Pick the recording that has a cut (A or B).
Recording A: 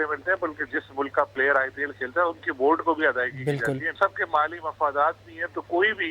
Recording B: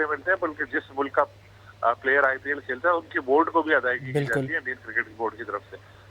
A